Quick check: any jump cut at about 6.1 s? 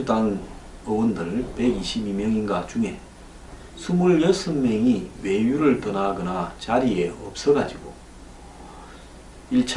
yes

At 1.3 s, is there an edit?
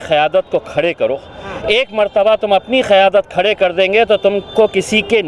no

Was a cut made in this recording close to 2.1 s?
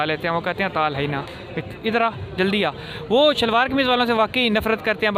no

